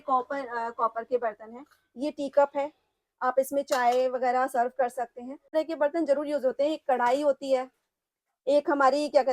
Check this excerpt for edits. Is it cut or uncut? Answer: cut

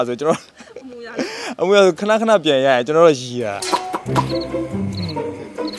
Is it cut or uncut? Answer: cut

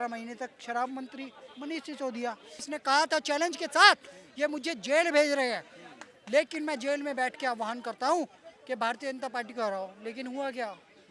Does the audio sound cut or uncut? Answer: cut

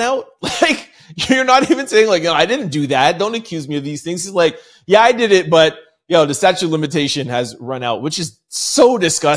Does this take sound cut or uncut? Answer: uncut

